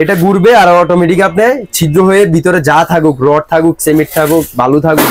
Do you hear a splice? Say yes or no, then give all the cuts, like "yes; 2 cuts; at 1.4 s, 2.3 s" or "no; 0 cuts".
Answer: no; 0 cuts